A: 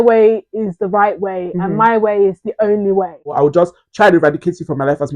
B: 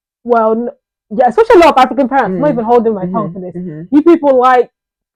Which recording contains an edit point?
A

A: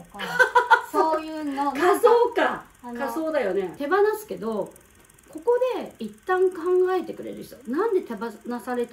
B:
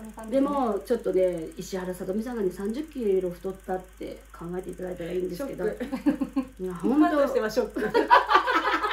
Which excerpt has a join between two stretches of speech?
A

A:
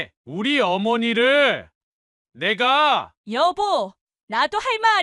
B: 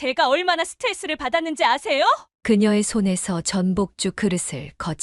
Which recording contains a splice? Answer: B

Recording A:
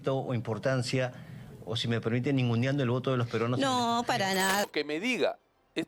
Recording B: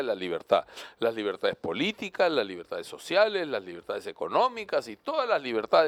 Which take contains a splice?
A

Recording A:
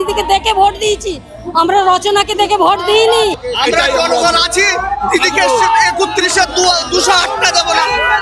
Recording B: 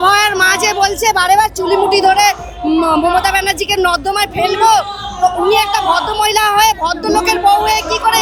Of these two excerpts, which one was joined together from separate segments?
A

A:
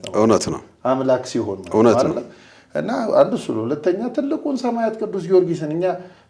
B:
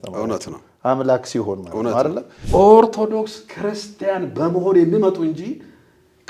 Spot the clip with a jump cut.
B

